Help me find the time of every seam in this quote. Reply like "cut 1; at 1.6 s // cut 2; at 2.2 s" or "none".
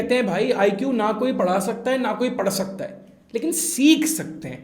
none